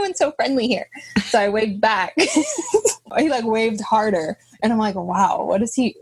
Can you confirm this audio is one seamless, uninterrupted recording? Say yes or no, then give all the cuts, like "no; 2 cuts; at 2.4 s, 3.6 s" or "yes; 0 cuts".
no; 1 cut; at 3.1 s